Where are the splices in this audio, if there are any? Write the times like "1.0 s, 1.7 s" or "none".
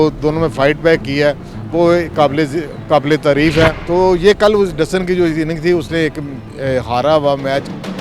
3.8 s